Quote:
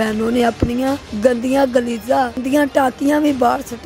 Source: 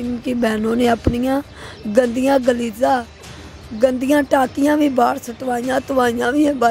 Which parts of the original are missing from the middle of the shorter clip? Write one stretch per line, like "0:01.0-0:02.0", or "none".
0:01.5-0:01.8
0:03.1-0:04.0